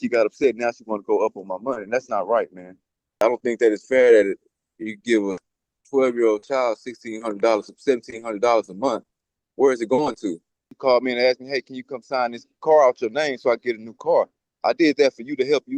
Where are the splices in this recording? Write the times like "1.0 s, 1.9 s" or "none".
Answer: 3.2 s, 10.7 s